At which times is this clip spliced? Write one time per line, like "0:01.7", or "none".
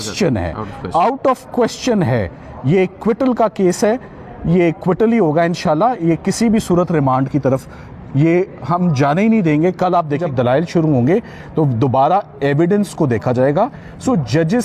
none